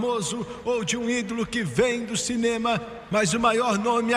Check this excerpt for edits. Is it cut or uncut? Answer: uncut